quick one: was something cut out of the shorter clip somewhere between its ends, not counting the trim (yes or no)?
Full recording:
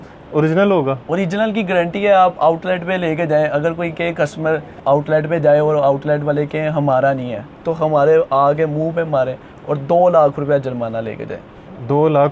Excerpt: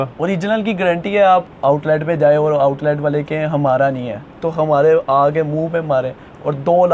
yes